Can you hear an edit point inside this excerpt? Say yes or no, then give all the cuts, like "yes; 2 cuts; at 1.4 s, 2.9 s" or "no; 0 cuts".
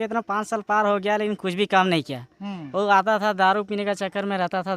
no; 0 cuts